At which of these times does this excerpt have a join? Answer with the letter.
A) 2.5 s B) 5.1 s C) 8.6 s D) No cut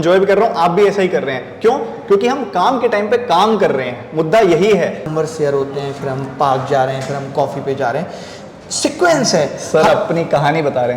B